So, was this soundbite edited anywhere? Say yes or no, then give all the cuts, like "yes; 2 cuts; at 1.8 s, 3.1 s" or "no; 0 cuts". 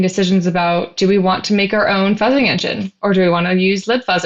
yes; 1 cut; at 0.9 s